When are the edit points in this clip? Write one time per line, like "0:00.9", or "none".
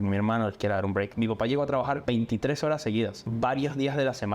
0:01.1
0:02.0
0:03.2

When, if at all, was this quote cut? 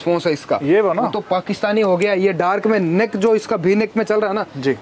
none

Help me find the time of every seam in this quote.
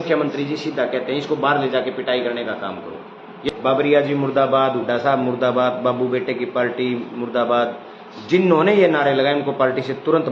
0:03.5

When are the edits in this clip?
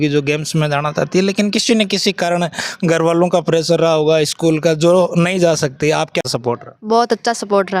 0:06.7

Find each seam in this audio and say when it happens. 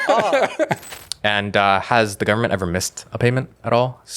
0:00.9

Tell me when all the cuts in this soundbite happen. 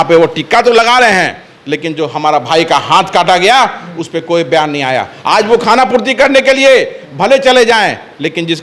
none

